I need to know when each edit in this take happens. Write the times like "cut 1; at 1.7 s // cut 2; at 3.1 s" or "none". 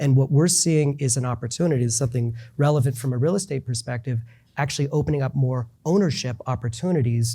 cut 1; at 5.7 s